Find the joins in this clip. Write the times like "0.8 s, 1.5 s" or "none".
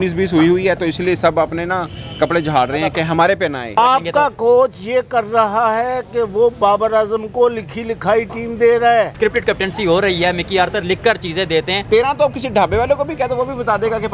3.8 s, 9.1 s, 11.8 s